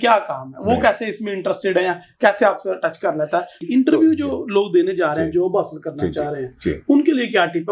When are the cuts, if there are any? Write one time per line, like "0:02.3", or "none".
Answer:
0:03.6